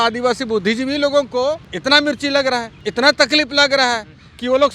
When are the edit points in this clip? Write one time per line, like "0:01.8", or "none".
0:01.7
0:02.7

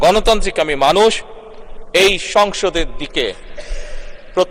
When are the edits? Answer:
none

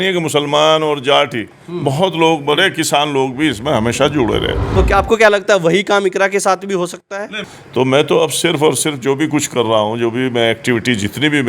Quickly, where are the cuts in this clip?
0:04.7
0:07.4

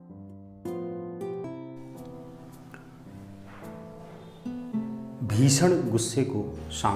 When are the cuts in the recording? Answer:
0:01.4

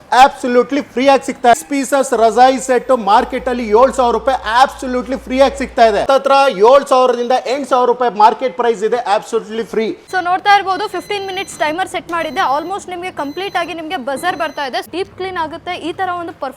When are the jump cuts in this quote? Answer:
0:01.5
0:06.1
0:10.0
0:14.9

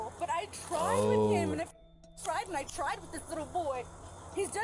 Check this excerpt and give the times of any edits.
none

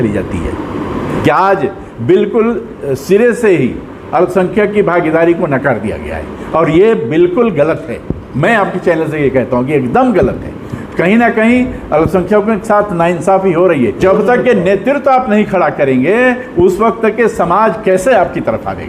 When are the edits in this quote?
0:01.1
0:14.0

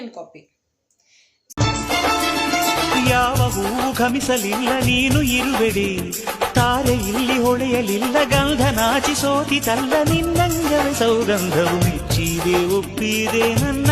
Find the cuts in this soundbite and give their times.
0:01.4

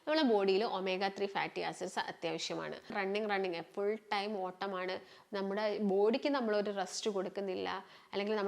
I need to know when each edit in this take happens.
0:02.9

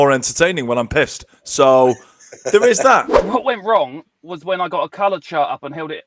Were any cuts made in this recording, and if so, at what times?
0:03.2

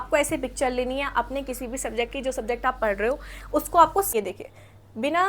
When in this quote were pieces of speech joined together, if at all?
0:04.1

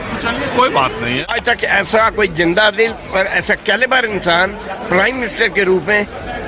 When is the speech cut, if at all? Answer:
0:01.4

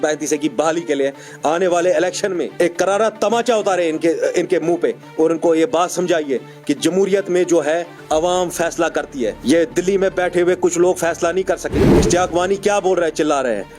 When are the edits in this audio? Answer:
0:02.5
0:09.4
0:11.8

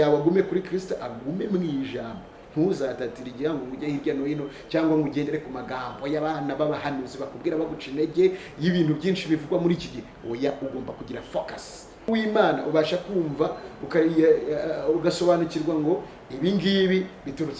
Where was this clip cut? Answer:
0:12.1

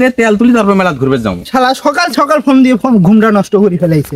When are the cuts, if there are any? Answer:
0:01.4

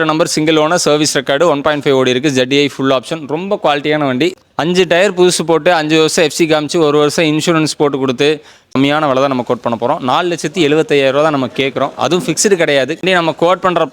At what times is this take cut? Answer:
0:04.3
0:08.7
0:13.0

